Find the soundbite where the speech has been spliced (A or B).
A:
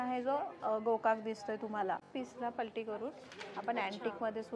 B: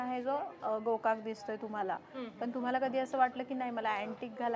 A